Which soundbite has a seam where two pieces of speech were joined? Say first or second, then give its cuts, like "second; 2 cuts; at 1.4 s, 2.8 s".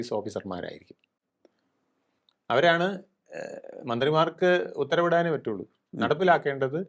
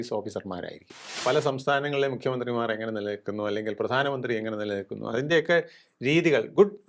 second; 1 cut; at 1.2 s